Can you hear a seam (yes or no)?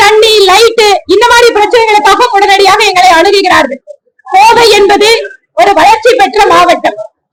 no